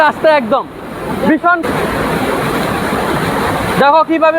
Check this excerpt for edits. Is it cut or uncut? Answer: cut